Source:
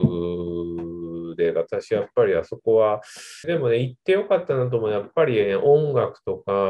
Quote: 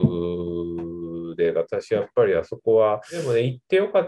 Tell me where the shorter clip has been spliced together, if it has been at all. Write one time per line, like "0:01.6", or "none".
0:03.1